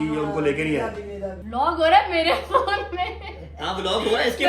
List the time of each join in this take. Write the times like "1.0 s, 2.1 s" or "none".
1.3 s